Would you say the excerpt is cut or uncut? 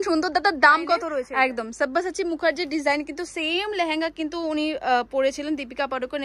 cut